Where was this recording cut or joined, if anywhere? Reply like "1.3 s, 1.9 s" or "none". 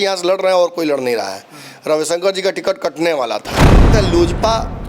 3.9 s